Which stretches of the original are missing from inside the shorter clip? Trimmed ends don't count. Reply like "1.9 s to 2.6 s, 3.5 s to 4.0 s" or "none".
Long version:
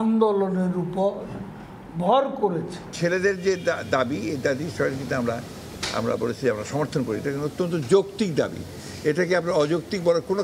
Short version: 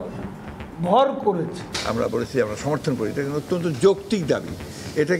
2.8 s to 5.7 s

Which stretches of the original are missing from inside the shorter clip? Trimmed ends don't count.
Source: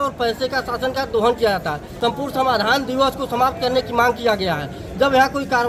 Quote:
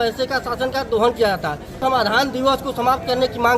1.9 s to 2.2 s

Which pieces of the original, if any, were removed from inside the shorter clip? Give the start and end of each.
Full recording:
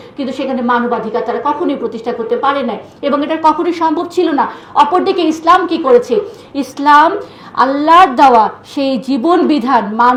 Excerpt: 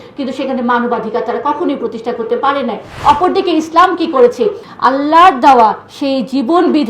2.9 s to 4.6 s, 6.4 s to 7.4 s

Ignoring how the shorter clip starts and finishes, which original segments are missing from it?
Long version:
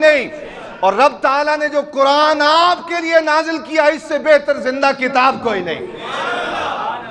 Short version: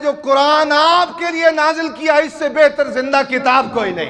none

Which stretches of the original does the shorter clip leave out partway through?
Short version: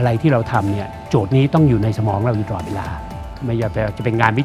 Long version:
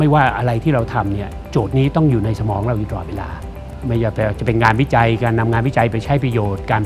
none

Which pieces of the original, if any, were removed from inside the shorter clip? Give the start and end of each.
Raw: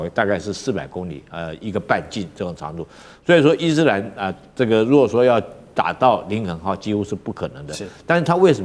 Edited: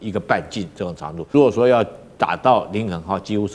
2.9 s to 4.9 s

